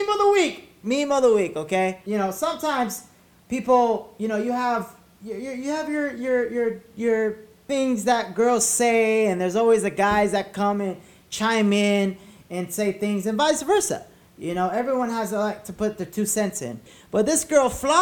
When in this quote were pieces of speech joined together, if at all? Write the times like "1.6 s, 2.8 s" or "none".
2.0 s, 7.5 s, 16.9 s